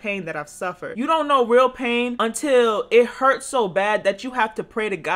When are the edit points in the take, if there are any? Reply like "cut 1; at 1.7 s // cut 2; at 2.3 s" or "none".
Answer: cut 1; at 0.9 s // cut 2; at 2.2 s